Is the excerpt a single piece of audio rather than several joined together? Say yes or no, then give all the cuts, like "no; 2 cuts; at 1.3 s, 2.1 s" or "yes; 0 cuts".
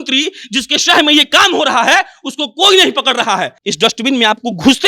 no; 1 cut; at 3.6 s